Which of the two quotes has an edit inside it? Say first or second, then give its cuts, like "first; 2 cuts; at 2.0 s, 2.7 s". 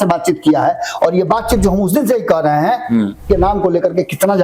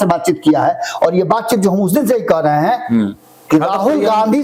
first; 1 cut; at 3.2 s